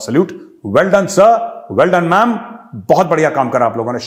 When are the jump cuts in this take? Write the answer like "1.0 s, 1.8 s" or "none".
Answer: none